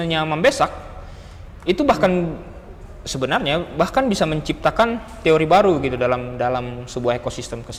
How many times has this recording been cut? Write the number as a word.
zero